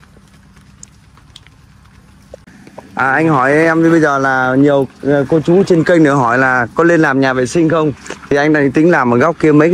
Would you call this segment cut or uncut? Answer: cut